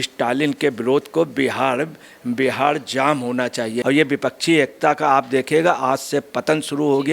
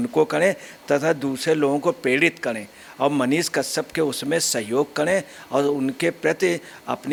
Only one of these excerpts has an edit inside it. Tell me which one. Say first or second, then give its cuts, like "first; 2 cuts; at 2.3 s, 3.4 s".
first; 1 cut; at 3.8 s